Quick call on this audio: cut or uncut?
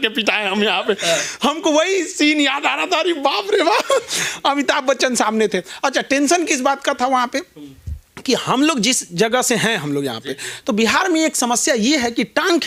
uncut